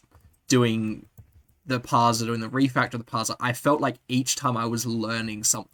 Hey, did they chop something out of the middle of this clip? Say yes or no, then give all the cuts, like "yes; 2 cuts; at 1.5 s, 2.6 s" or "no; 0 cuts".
no; 0 cuts